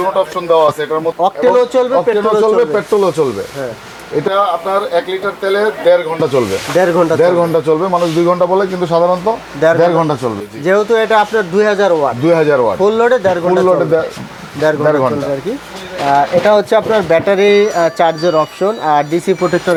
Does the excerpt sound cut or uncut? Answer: uncut